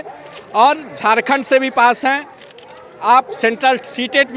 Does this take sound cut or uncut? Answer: uncut